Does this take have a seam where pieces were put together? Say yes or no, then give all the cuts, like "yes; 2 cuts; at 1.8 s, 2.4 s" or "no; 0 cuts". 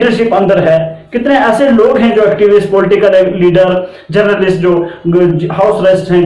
no; 0 cuts